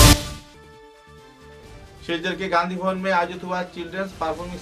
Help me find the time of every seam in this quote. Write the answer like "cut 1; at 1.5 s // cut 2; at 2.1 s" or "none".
cut 1; at 1.6 s